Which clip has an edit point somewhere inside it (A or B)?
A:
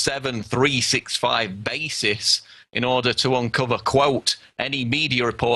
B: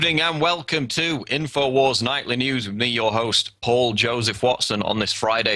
B